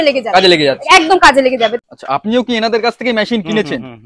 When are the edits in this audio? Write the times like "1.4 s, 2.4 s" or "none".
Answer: 1.7 s